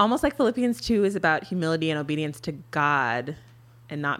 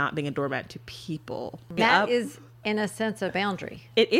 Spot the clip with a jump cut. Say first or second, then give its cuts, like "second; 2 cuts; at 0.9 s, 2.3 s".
second; 1 cut; at 1.7 s